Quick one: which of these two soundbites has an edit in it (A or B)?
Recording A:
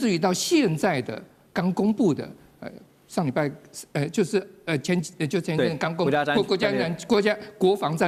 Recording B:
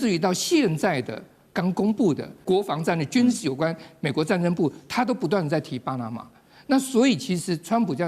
B